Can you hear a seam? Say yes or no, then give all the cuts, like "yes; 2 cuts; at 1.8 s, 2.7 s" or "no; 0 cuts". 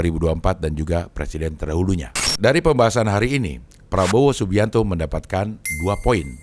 yes; 1 cut; at 2.2 s